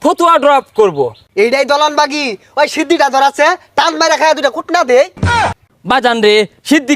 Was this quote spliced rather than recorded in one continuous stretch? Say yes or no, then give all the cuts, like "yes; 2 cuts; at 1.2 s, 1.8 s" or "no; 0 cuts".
yes; 2 cuts; at 1.2 s, 5.4 s